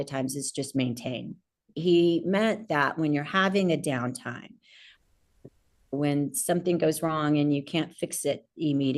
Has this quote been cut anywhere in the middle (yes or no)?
yes